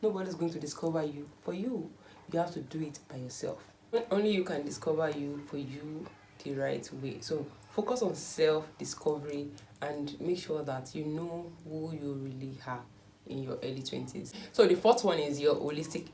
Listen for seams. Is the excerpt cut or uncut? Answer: uncut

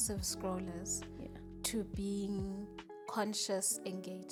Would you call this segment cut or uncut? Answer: uncut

